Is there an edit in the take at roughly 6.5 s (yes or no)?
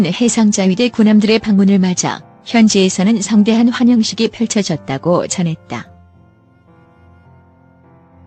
yes